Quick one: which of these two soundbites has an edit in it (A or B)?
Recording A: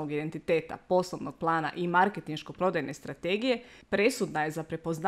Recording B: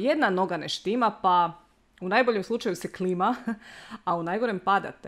A